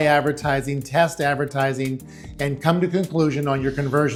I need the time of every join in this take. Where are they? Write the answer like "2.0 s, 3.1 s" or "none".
none

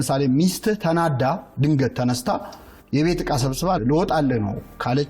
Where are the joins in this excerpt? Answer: 3.8 s

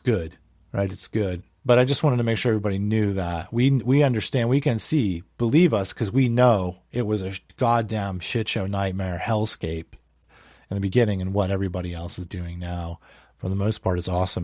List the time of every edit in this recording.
1.5 s

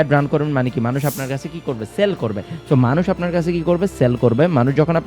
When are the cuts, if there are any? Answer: none

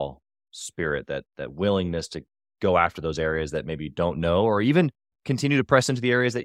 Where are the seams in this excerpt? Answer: none

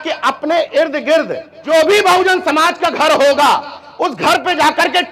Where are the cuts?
1.6 s

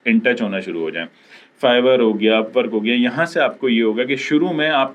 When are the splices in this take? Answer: none

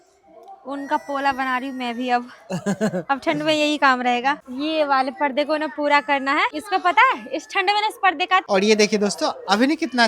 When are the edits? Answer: 4.5 s, 6.5 s, 8.4 s

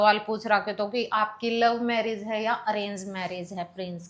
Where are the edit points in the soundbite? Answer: none

